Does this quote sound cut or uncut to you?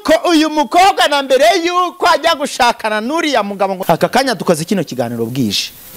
cut